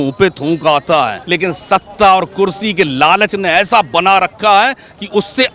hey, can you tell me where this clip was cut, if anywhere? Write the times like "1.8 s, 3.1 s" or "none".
1.2 s